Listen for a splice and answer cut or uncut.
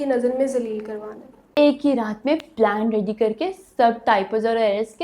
cut